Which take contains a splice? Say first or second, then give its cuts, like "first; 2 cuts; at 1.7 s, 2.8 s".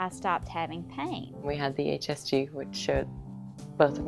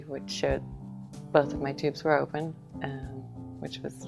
first; 1 cut; at 1.4 s